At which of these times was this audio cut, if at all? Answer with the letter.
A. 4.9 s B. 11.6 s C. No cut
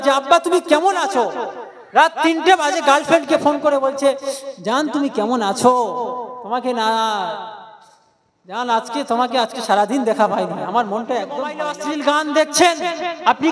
B